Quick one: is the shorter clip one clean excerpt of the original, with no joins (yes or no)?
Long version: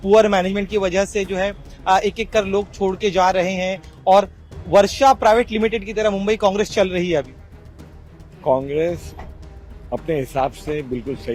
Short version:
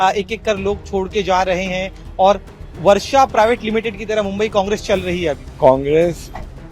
no